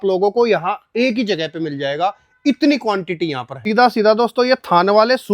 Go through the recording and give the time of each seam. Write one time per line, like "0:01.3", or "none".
0:03.6